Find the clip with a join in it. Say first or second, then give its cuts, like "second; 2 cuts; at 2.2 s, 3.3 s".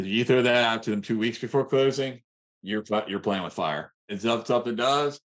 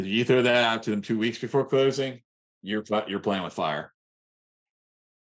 first; 1 cut; at 4.1 s